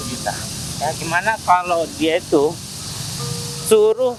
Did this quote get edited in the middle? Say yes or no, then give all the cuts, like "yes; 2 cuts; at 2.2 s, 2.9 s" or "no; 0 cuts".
no; 0 cuts